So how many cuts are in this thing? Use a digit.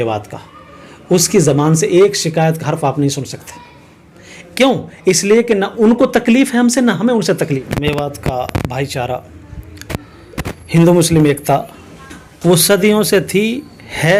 1